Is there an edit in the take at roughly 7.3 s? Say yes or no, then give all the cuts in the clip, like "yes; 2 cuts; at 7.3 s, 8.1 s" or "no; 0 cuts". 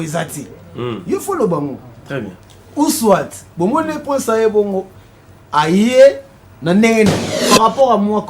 yes; 1 cut; at 7.3 s